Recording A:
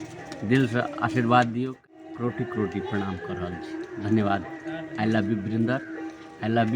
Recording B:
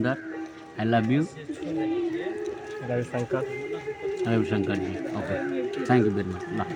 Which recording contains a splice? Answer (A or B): A